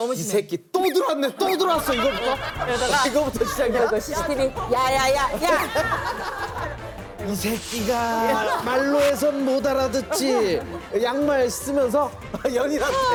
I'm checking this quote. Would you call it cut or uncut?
uncut